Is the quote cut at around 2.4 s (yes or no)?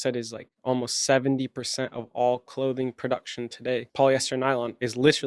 no